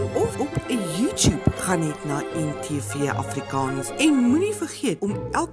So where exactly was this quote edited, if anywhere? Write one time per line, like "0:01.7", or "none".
none